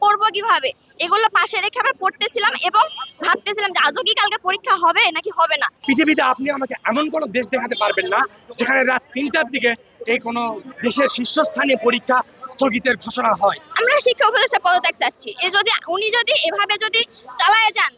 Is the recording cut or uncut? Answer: cut